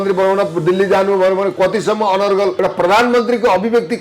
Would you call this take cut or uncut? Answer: cut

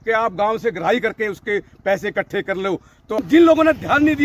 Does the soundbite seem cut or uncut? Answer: cut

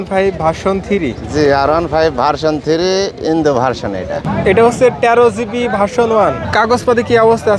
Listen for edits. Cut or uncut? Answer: cut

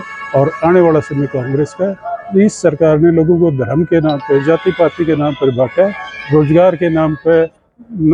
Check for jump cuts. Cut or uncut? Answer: uncut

